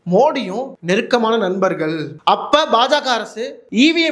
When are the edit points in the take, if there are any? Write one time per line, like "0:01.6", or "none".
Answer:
0:02.1